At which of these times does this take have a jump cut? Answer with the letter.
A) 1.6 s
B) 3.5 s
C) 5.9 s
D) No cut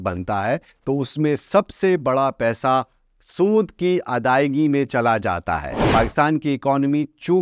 C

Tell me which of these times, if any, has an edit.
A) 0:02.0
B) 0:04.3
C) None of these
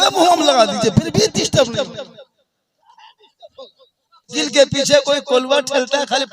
B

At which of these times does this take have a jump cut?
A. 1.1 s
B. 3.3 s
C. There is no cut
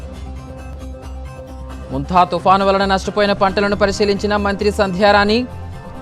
C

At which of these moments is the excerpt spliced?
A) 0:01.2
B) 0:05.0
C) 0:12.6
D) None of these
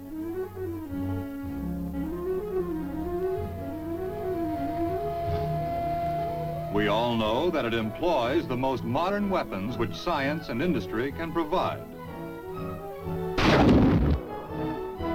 C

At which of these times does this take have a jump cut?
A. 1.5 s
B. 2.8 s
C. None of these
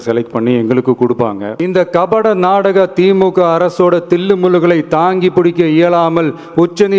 A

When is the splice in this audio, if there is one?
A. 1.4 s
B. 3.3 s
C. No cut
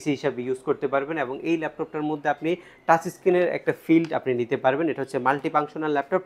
C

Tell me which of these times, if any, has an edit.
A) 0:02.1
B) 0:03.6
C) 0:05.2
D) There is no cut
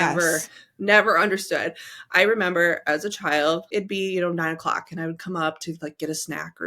B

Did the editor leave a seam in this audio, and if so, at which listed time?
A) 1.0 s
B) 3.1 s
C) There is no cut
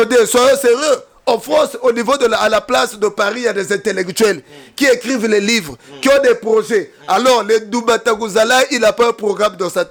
C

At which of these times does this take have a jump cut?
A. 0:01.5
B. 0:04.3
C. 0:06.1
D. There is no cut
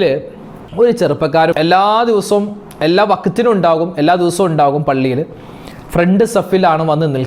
A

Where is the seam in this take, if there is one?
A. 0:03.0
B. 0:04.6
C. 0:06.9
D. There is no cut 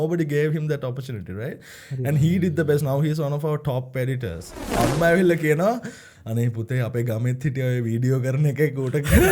B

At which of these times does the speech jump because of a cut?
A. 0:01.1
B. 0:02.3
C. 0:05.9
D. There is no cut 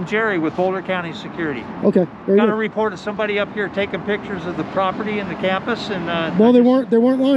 D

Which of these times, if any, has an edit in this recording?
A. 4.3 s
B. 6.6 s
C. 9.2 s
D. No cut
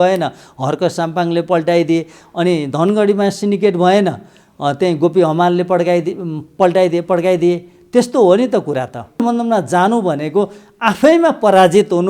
C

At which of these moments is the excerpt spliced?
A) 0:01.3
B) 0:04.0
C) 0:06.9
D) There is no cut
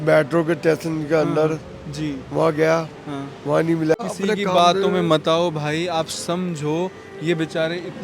B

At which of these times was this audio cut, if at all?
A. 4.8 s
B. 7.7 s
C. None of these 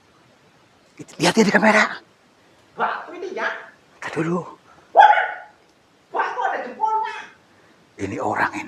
A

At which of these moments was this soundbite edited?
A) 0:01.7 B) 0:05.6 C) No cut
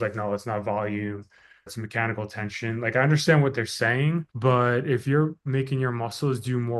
A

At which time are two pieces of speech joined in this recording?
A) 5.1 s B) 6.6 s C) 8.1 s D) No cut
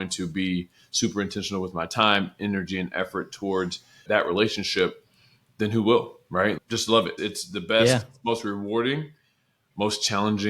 B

